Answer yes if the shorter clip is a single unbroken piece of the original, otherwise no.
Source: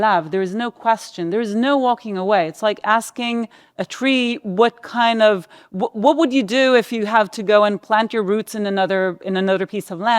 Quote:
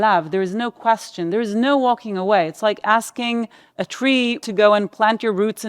no